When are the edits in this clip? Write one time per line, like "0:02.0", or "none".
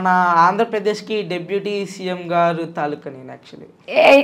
none